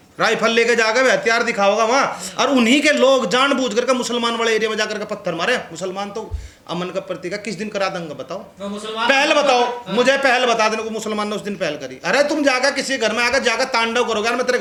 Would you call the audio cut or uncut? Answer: uncut